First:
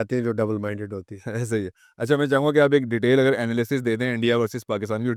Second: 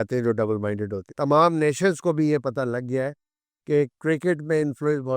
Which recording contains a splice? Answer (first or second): second